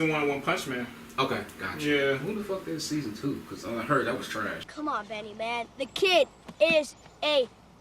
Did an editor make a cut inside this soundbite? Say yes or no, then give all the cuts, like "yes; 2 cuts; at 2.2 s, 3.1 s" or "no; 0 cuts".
yes; 1 cut; at 4.7 s